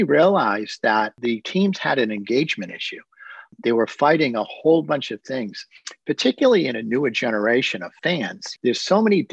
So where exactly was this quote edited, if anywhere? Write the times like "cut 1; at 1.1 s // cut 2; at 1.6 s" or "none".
cut 1; at 1.1 s // cut 2; at 8.3 s